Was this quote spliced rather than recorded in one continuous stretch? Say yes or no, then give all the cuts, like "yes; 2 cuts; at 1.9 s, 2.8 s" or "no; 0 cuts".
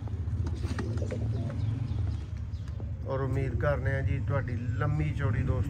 no; 0 cuts